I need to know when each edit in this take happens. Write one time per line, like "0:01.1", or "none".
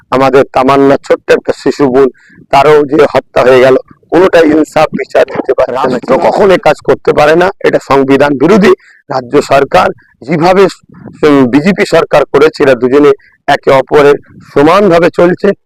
0:05.9

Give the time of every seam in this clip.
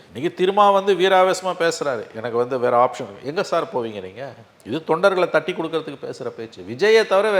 none

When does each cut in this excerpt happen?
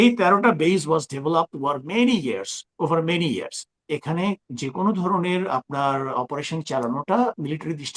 0:03.9

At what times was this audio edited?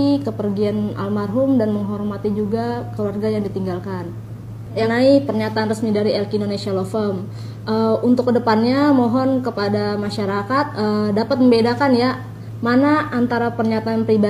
0:04.8

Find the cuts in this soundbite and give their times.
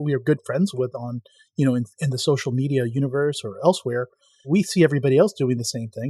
0:04.4

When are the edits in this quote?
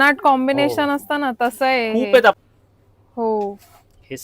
0:02.4

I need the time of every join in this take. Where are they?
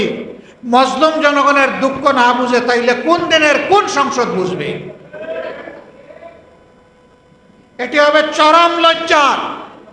none

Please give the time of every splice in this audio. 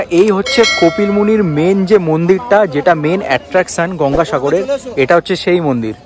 none

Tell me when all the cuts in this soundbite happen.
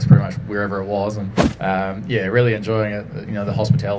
0:01.4

